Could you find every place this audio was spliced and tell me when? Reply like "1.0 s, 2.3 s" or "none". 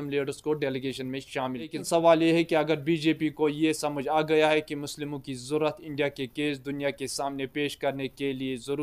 1.8 s